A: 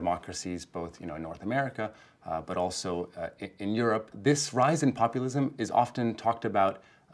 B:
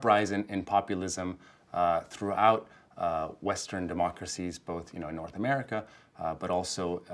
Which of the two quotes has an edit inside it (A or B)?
A